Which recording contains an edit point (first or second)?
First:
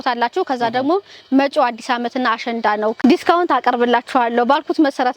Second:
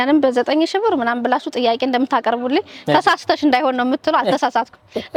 first